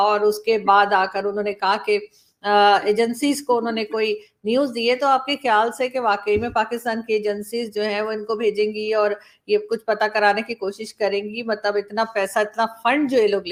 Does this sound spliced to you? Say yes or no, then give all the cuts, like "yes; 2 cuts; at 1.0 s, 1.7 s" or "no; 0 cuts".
no; 0 cuts